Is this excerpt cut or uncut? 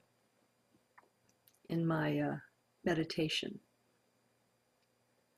cut